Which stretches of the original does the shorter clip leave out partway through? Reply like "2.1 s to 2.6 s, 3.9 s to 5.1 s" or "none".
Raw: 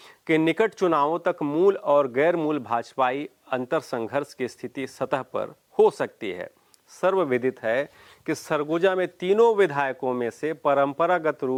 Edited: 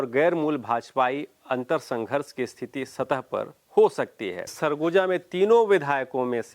6.6 s to 8.4 s